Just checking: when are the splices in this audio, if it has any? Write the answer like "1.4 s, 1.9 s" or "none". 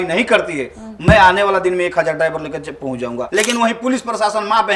3.3 s